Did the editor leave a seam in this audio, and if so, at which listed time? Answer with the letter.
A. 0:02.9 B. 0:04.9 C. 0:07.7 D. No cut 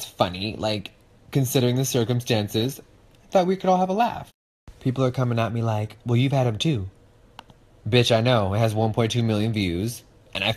C